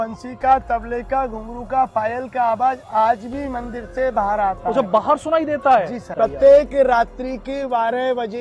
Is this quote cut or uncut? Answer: cut